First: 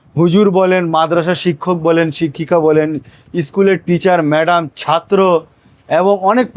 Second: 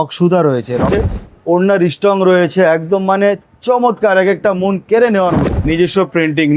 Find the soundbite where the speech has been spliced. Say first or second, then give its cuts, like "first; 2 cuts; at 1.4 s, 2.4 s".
second; 2 cuts; at 1.1 s, 5.5 s